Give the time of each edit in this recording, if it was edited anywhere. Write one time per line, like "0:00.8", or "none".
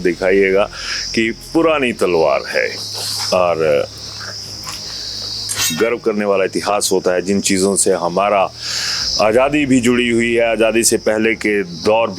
0:05.7

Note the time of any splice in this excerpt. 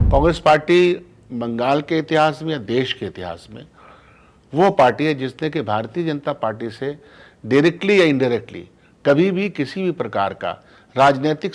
none

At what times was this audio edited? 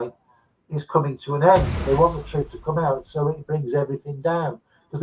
0:01.7

